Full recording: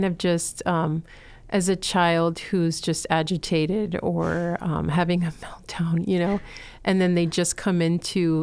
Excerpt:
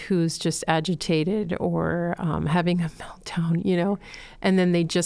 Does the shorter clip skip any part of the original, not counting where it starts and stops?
no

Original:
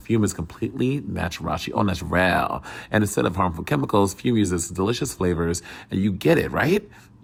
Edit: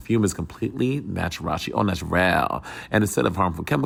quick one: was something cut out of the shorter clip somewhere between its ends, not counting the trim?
no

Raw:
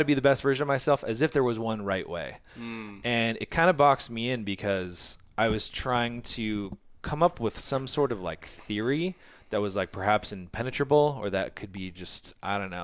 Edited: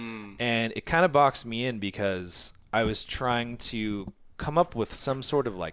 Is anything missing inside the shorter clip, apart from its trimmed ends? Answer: no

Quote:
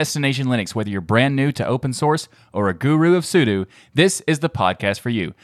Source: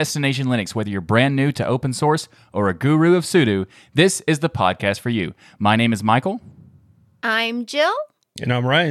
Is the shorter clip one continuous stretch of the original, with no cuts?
yes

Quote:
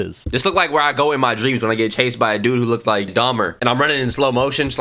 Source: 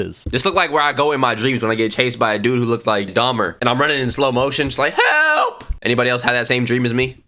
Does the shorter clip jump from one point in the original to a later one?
no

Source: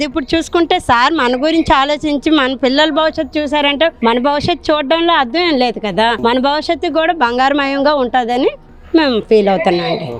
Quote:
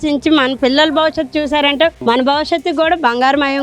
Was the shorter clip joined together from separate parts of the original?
yes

